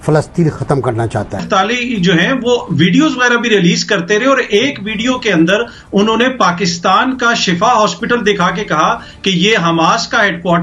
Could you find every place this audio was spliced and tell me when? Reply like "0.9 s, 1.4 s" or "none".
1.4 s